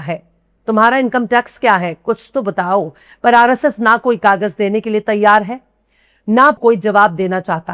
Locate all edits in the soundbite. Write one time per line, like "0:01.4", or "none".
0:06.6